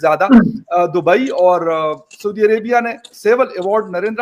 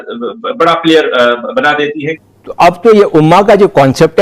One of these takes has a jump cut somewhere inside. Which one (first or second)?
second